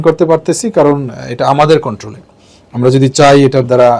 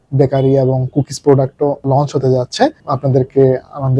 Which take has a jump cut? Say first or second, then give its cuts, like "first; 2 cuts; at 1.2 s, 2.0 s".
second; 2 cuts; at 1.8 s, 2.8 s